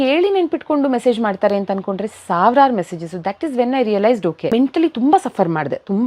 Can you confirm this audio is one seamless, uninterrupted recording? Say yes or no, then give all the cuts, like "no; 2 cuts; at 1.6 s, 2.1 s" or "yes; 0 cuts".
no; 1 cut; at 4.5 s